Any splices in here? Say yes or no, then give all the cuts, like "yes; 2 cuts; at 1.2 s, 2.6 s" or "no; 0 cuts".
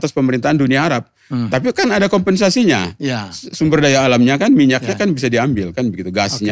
no; 0 cuts